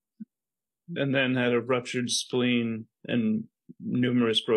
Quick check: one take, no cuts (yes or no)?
no